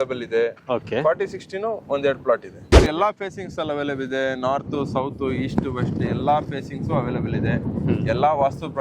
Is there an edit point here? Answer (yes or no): yes